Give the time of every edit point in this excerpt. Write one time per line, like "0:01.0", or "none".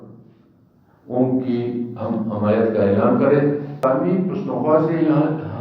0:03.8